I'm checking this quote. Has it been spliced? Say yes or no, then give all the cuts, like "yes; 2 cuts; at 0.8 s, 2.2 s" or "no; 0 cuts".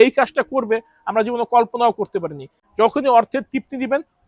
yes; 1 cut; at 2.6 s